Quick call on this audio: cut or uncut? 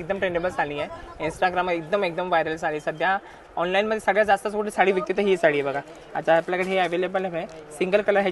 uncut